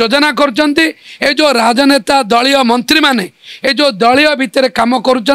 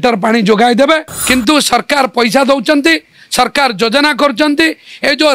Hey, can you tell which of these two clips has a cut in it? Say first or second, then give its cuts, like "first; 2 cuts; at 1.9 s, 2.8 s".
second; 1 cut; at 1.1 s